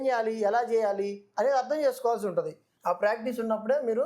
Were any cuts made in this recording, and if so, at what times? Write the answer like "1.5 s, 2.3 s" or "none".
2.7 s